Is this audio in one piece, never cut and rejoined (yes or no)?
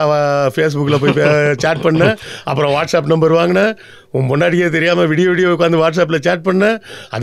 yes